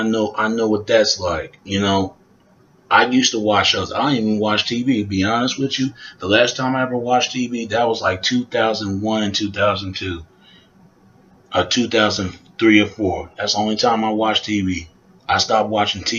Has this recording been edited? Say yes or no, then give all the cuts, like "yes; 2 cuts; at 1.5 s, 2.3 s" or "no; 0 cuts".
yes; 1 cut; at 10.0 s